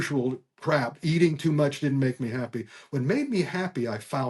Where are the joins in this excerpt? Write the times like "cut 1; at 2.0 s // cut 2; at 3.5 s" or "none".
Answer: none